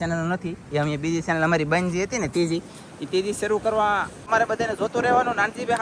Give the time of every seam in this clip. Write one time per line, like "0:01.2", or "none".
0:04.2